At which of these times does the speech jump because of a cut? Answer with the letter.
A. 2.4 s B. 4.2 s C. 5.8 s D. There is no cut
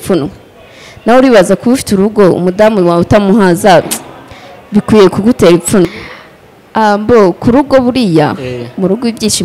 C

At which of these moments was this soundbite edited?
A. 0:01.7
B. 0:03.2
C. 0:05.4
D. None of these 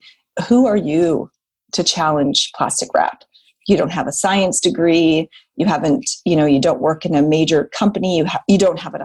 D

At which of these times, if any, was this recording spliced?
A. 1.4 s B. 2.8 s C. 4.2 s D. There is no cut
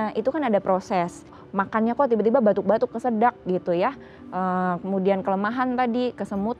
A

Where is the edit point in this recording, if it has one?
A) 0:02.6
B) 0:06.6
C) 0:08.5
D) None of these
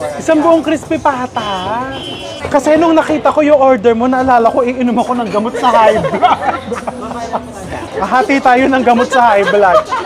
D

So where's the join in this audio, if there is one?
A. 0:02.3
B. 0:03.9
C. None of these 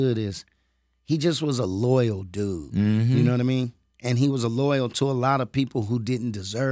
C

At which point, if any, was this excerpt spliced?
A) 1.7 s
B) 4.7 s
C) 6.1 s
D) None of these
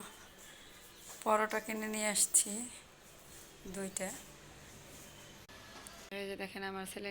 C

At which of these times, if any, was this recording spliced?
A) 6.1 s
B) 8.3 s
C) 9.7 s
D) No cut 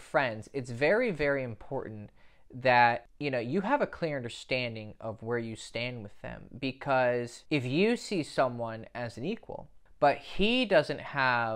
C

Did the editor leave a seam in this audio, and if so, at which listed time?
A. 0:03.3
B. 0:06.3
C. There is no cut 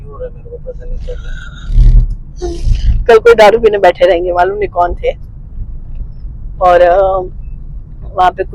C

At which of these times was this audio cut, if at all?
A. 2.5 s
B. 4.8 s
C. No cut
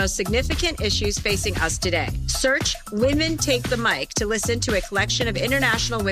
C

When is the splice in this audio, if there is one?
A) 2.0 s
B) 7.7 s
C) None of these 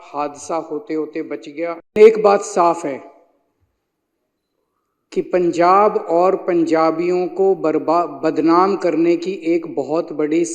A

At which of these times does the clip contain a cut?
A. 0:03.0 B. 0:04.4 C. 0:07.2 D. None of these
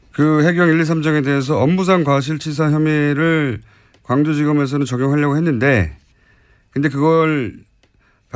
C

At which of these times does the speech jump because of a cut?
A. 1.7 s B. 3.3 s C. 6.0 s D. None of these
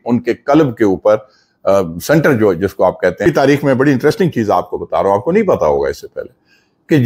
B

